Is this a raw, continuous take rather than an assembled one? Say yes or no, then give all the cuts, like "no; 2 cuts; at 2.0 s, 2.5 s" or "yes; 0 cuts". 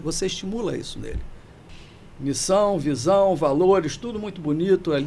no; 1 cut; at 1.7 s